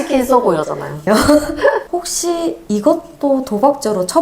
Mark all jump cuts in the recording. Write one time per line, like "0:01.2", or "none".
0:01.0

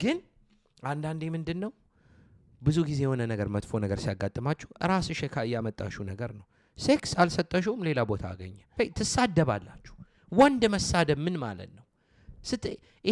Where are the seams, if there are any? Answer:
0:08.7

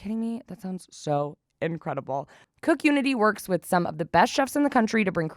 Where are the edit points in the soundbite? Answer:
0:02.4

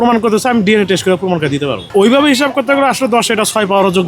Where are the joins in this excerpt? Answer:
0:01.9

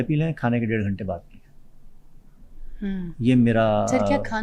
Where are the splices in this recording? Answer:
none

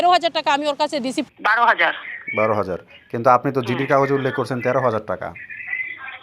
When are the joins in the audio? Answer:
0:01.2

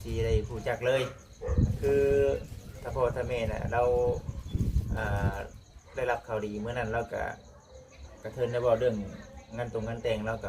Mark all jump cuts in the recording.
0:01.7

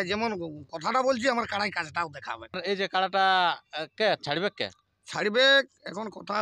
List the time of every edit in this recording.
0:02.6

